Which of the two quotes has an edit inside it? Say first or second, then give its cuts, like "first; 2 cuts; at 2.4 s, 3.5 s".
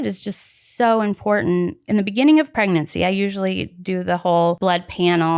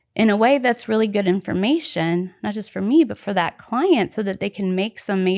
first; 3 cuts; at 1.8 s, 2.5 s, 4.6 s